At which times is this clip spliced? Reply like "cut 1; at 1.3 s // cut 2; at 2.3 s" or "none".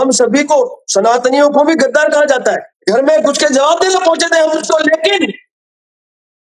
cut 1; at 2.7 s